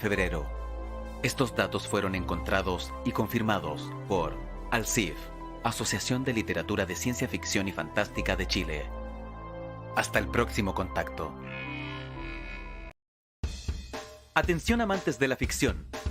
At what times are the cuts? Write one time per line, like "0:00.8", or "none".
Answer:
0:13.0